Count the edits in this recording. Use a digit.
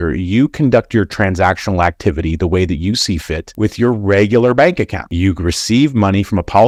0